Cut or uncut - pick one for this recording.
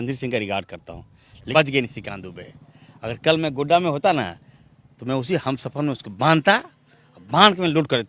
cut